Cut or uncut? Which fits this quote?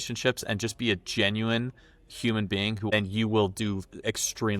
cut